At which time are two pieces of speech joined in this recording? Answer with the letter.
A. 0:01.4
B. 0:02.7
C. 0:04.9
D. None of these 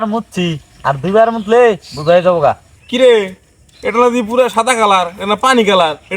B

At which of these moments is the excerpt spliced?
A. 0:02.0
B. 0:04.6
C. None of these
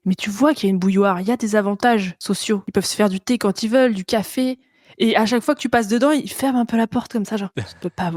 C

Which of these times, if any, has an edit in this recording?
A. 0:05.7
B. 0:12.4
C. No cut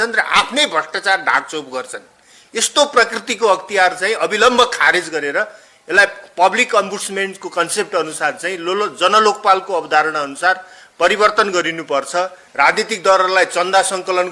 B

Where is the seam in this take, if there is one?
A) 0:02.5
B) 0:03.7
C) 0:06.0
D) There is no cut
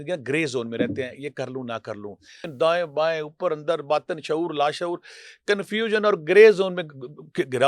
A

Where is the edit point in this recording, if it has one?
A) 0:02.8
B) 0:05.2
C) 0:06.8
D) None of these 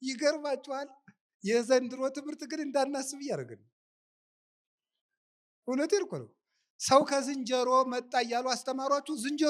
D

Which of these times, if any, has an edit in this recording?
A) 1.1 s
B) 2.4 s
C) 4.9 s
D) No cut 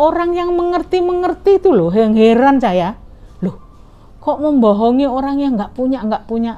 D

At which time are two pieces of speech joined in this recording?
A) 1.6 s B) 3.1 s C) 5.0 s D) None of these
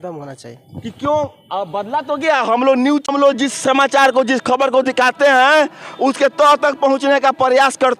B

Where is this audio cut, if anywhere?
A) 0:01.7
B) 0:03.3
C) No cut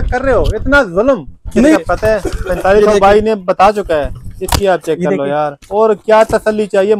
A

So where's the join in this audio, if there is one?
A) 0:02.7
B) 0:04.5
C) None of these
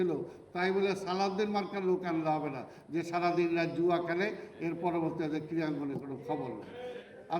C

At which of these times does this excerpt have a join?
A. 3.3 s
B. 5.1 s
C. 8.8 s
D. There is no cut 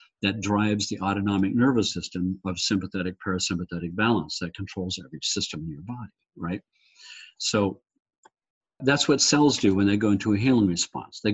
C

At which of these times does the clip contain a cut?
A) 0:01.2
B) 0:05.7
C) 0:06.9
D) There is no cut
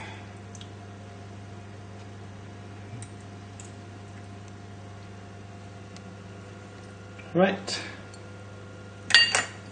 D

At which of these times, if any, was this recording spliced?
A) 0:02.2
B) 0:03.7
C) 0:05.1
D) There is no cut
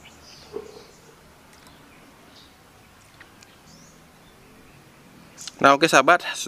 B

